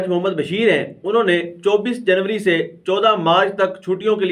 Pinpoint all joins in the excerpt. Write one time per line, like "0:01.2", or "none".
none

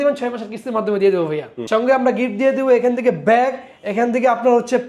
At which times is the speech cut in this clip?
0:01.5

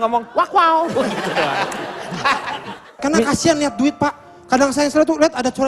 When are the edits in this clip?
0:03.0

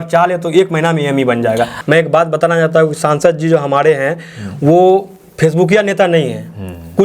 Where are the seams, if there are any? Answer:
0:01.7

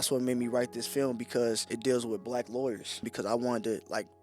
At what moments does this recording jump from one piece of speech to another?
0:01.7
0:03.1

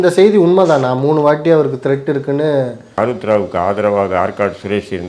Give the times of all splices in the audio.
0:03.0

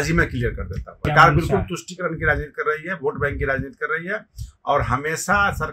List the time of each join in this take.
0:01.1

